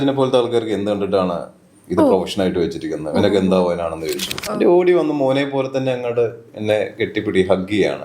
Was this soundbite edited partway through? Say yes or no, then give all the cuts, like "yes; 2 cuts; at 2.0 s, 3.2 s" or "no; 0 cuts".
yes; 1 cut; at 4.3 s